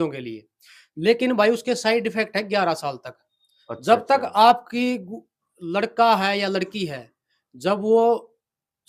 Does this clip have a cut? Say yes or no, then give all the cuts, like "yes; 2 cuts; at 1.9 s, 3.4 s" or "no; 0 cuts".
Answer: no; 0 cuts